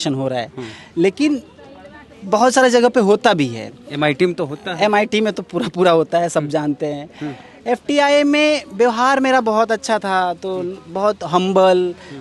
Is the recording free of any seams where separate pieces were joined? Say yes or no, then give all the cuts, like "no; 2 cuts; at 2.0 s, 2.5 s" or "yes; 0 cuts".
yes; 0 cuts